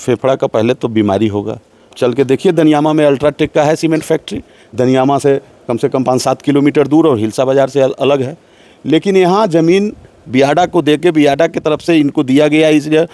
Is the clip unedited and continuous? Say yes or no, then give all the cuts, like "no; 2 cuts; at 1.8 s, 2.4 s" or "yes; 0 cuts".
no; 1 cut; at 1.9 s